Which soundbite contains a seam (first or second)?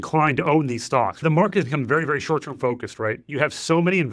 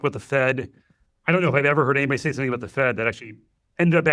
first